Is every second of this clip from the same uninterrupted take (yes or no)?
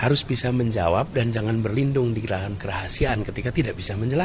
yes